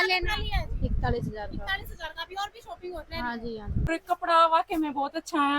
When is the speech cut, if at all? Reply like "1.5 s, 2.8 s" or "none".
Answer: 3.9 s